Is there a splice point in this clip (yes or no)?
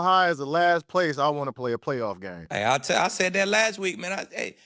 no